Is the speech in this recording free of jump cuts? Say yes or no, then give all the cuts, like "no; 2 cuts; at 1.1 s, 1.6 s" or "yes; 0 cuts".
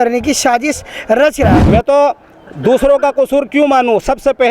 no; 1 cut; at 1.6 s